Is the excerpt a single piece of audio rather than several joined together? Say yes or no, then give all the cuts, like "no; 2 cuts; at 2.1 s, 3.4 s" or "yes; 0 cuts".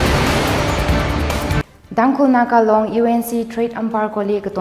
no; 1 cut; at 1.6 s